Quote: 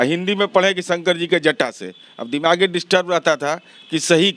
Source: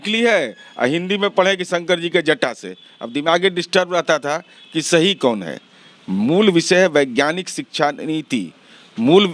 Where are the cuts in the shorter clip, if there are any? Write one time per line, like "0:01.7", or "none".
none